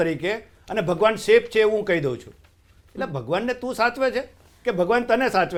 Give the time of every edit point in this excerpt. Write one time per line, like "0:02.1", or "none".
none